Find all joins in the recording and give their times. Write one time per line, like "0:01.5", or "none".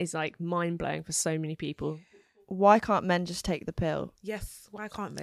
0:02.4
0:04.2